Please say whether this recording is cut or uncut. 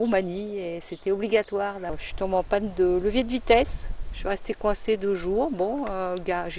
cut